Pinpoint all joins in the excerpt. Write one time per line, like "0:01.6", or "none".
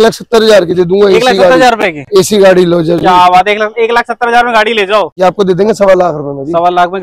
0:05.1